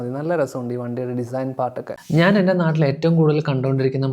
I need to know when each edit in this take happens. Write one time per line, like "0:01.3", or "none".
0:02.0